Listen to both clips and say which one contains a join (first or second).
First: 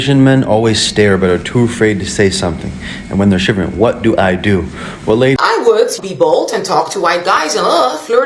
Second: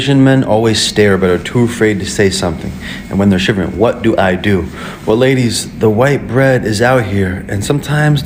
first